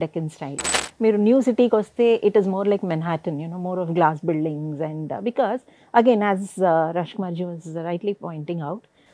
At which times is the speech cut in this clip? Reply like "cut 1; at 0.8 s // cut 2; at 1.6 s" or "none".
none